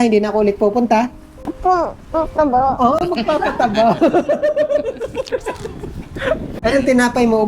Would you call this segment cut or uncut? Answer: cut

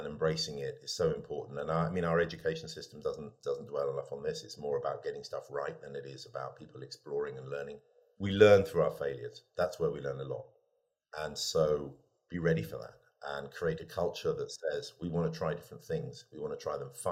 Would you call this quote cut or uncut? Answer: uncut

